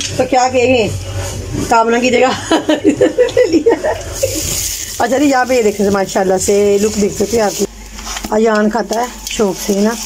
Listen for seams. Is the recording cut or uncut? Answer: cut